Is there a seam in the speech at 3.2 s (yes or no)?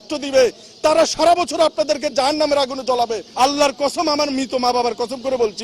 yes